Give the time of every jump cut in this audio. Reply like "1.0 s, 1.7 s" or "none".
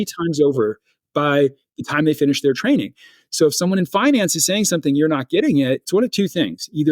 5.8 s